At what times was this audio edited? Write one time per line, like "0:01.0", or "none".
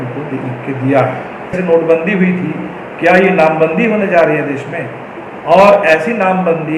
0:01.6